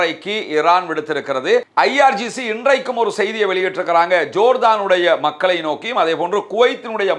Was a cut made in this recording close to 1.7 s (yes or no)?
yes